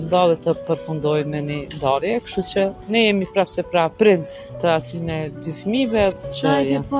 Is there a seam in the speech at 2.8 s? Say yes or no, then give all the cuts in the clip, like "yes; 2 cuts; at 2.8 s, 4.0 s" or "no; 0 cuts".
yes; 3 cuts; at 2.8 s, 3.9 s, 6.1 s